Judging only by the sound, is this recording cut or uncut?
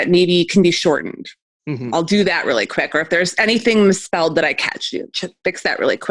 uncut